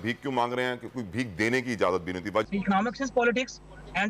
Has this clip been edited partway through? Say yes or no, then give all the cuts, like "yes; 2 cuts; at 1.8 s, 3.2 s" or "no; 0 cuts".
yes; 1 cut; at 2.5 s